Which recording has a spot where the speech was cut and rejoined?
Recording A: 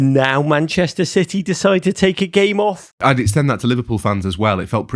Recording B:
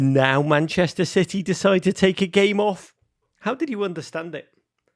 A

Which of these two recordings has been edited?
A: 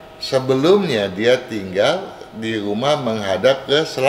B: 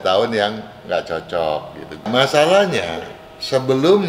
B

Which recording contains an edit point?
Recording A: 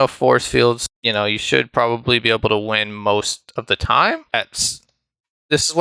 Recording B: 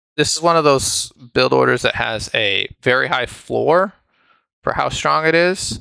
A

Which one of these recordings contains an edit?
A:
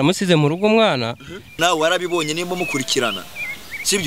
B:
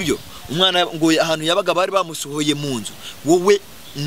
A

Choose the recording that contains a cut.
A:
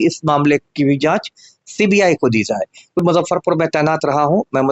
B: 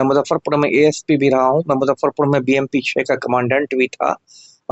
A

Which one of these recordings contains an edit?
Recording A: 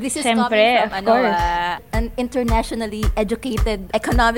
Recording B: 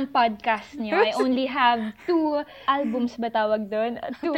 B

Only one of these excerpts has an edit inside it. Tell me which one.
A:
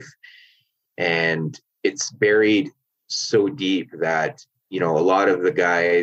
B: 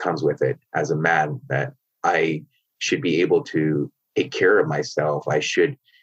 A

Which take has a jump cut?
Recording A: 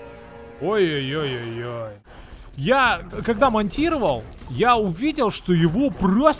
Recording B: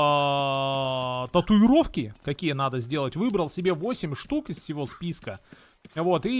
A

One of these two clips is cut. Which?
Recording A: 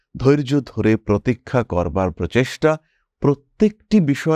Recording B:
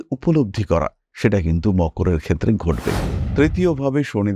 B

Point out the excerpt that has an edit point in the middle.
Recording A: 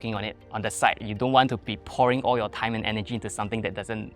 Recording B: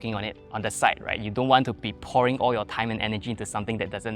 A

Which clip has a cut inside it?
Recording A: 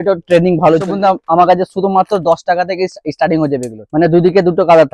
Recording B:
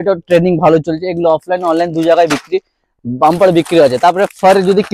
A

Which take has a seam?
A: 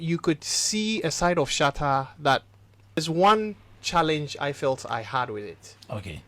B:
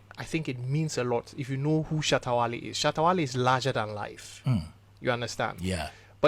A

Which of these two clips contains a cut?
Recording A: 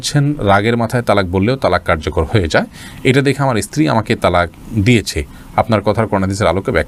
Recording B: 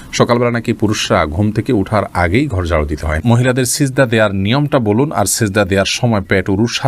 B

